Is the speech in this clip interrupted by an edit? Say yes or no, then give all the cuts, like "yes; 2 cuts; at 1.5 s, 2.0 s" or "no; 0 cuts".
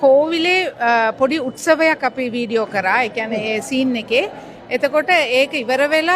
no; 0 cuts